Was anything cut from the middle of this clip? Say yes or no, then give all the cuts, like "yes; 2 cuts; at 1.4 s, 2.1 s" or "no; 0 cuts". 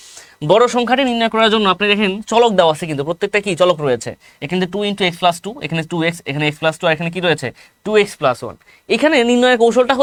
no; 0 cuts